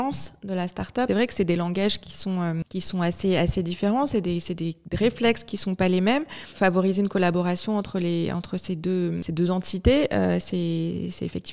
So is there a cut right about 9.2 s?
yes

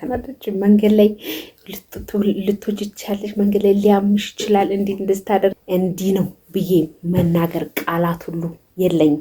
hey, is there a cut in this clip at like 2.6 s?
no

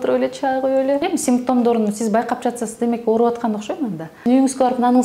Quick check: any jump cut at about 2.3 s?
no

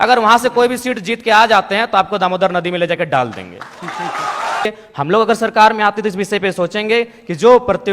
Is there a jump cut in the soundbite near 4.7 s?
yes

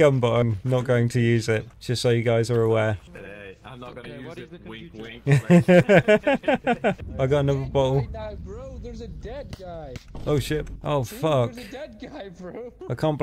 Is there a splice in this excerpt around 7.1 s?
yes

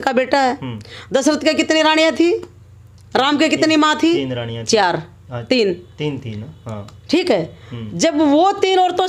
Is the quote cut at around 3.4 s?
no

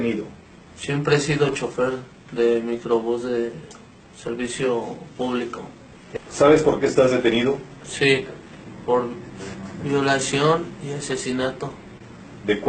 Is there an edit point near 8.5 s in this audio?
no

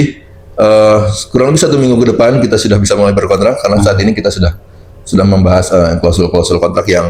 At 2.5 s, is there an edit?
no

